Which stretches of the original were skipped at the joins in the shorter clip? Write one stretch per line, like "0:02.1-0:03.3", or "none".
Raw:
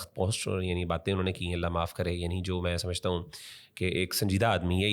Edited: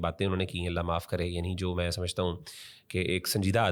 none